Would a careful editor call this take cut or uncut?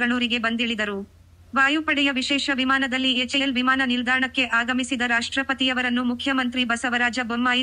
uncut